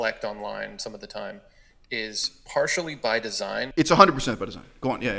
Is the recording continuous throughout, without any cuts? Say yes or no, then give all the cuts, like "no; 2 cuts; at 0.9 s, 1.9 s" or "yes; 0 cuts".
no; 1 cut; at 3.7 s